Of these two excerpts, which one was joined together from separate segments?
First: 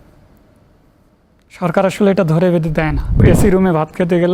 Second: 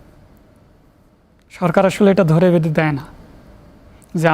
first; 1 cut; at 3.2 s

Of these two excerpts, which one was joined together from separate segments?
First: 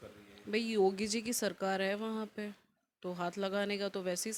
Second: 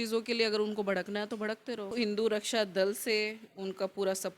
second; 1 cut; at 1.9 s

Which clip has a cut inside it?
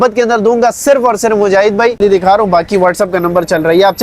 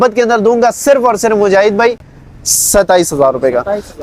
first; 1 cut; at 2.0 s

